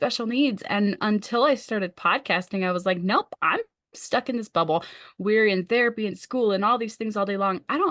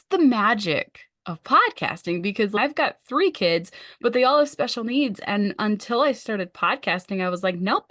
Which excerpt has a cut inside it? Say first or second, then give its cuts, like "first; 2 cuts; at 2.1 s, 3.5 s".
second; 1 cut; at 2.6 s